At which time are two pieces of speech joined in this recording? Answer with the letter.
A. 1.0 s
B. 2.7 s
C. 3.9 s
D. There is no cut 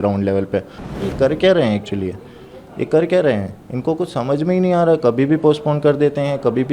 A